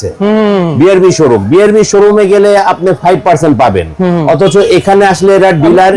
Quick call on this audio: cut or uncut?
uncut